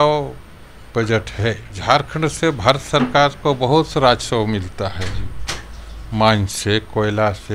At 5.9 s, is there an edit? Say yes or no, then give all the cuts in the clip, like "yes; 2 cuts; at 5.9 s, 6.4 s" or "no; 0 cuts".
no; 1 cut; at 1.7 s